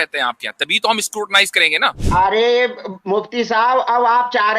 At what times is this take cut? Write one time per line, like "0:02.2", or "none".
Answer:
0:01.9

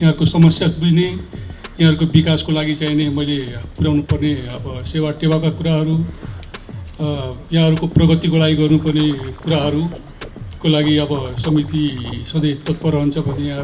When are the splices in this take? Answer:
none

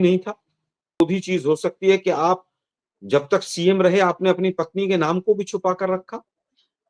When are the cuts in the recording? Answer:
0:01.0

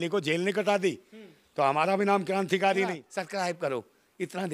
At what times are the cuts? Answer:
0:03.1

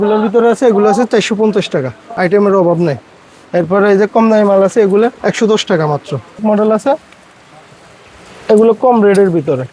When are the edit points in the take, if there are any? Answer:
0:02.1
0:06.4

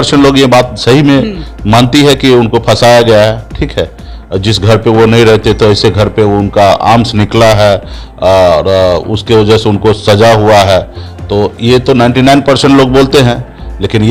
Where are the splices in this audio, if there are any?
none

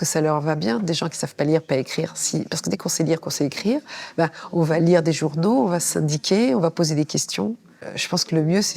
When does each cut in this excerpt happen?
0:07.7

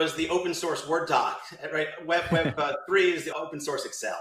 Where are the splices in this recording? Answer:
0:03.3

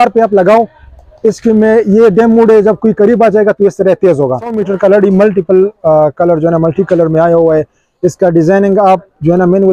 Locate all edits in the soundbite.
0:04.6

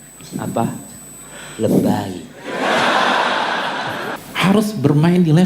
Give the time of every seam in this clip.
0:04.2

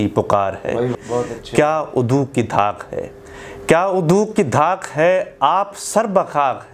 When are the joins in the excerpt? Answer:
0:00.9

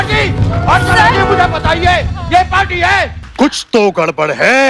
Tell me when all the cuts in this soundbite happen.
0:03.2

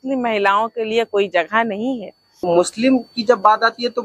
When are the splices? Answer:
0:02.3

